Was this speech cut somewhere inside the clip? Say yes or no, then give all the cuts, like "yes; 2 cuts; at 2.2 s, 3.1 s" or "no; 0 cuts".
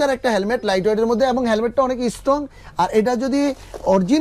no; 0 cuts